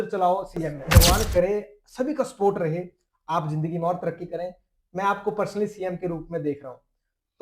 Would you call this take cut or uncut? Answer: cut